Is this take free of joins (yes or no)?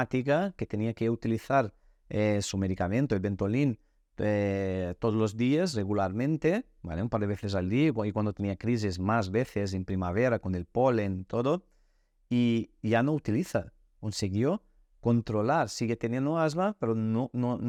yes